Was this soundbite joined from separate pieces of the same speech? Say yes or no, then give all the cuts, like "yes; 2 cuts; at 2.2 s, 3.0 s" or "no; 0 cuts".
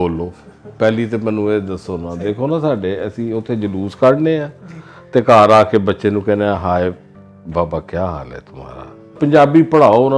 yes; 1 cut; at 9.2 s